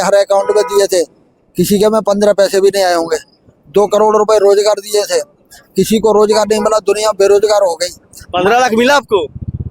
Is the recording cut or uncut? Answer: uncut